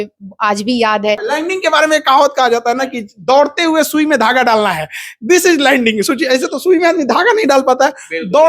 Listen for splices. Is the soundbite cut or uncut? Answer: cut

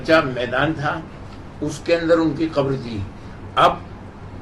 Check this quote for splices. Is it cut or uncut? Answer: uncut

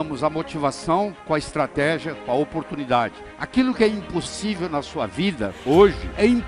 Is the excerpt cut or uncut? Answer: cut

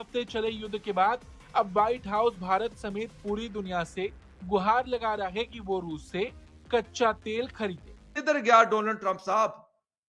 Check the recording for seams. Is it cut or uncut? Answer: cut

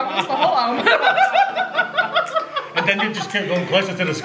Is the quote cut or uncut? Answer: uncut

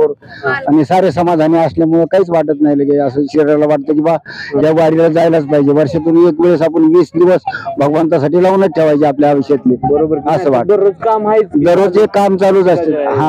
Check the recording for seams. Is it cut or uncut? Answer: uncut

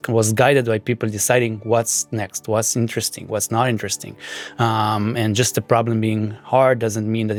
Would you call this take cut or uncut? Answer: uncut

